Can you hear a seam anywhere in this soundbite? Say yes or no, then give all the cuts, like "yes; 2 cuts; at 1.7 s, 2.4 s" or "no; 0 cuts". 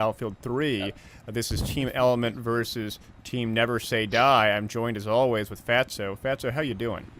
yes; 1 cut; at 4.9 s